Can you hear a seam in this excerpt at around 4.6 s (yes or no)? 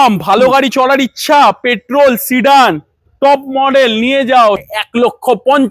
yes